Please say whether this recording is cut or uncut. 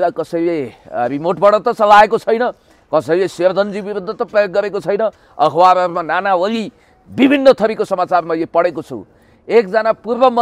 uncut